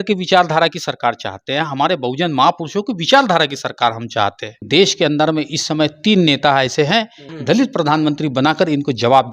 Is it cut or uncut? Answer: cut